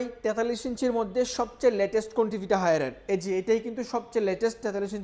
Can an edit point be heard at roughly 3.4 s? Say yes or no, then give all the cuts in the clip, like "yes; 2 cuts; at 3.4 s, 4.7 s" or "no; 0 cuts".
no; 0 cuts